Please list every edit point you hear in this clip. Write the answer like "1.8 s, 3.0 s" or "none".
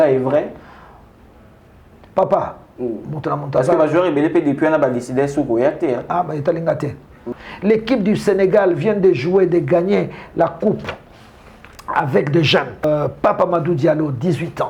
7.2 s, 12.8 s